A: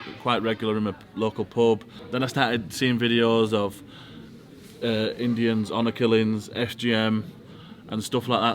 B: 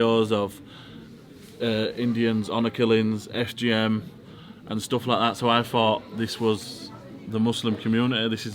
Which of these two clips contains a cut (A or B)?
A